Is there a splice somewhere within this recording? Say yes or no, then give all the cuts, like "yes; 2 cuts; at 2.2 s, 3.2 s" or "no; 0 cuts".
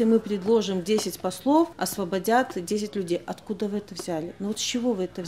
yes; 1 cut; at 1.8 s